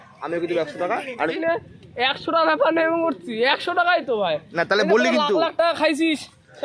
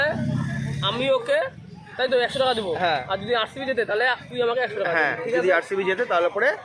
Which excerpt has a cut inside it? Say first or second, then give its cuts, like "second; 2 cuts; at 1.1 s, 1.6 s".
first; 1 cut; at 1.3 s